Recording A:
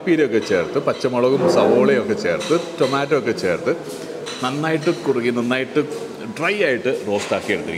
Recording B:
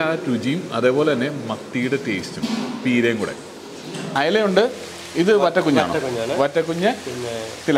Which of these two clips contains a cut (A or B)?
B